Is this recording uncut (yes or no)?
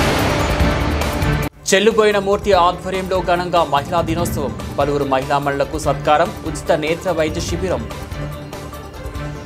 no